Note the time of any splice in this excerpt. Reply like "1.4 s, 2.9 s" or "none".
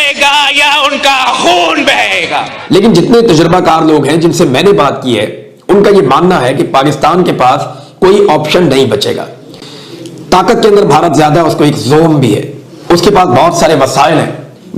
2.7 s